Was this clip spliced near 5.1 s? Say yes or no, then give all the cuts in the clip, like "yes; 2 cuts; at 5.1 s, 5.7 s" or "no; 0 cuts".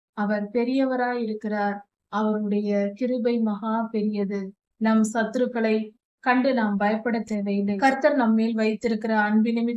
no; 1 cut; at 7.8 s